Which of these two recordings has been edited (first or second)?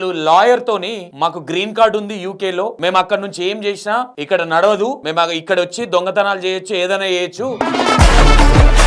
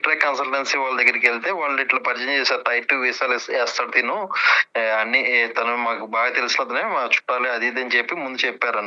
first